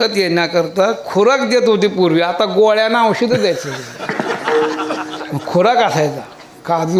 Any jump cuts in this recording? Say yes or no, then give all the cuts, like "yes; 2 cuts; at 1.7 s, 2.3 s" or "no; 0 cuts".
no; 0 cuts